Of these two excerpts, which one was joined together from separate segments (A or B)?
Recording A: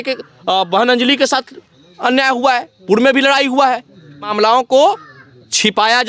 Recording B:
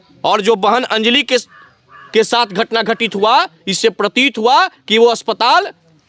A